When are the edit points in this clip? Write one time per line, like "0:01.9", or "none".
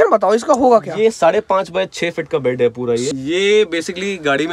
0:03.1